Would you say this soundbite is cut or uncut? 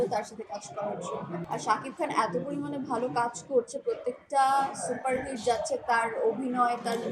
cut